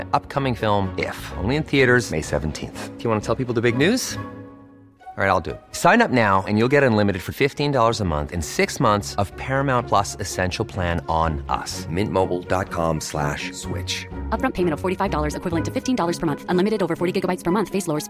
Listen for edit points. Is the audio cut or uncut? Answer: uncut